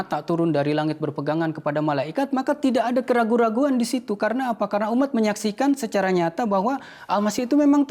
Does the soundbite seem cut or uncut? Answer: uncut